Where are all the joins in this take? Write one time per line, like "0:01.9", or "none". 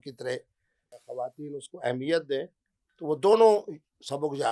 0:01.0